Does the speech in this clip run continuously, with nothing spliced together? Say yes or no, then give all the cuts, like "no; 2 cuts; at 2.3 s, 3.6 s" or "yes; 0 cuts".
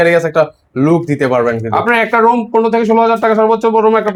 yes; 0 cuts